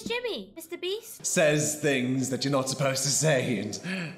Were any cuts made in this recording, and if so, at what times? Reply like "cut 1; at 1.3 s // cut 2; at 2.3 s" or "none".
cut 1; at 1.1 s